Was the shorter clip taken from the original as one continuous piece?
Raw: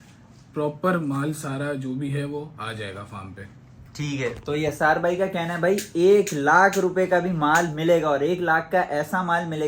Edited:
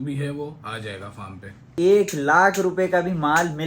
no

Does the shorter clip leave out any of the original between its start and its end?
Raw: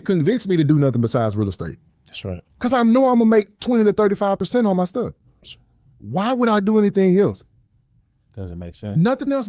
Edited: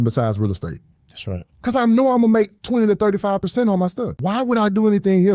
yes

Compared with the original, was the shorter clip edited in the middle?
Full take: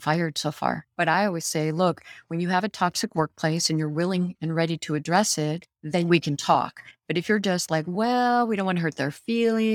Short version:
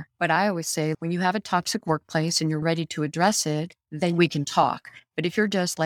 yes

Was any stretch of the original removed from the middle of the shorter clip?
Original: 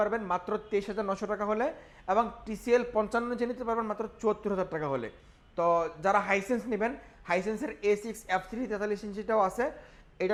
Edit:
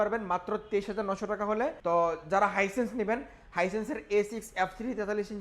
yes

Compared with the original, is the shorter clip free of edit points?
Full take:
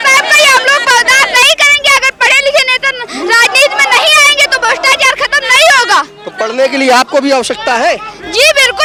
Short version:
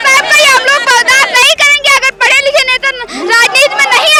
yes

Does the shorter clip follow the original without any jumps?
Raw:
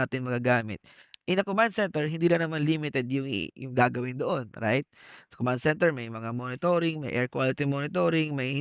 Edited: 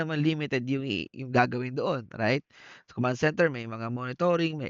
yes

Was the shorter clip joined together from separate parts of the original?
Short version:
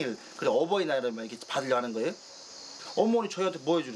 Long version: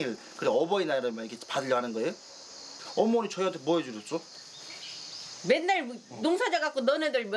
no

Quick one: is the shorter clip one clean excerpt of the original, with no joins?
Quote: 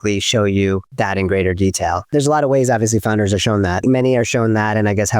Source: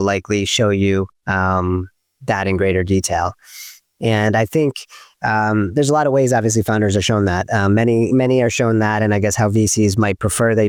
no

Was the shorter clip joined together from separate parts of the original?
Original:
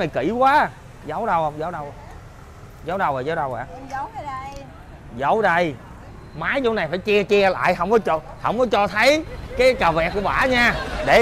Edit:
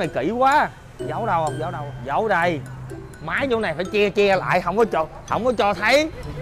yes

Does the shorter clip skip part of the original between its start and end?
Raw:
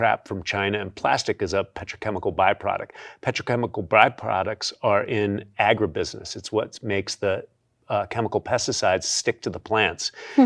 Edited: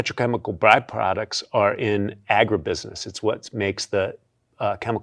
no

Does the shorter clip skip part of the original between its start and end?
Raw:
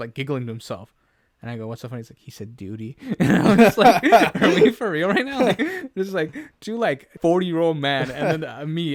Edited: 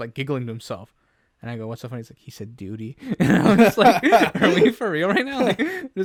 no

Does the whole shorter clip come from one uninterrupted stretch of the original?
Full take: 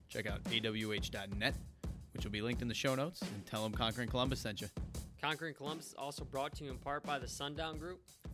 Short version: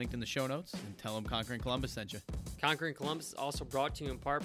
no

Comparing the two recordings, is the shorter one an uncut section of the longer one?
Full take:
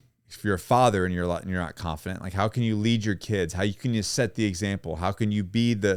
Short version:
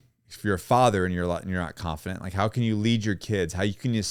yes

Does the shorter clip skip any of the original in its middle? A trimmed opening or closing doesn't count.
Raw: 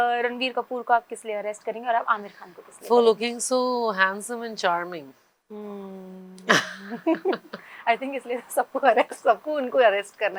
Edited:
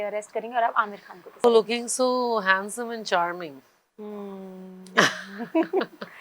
yes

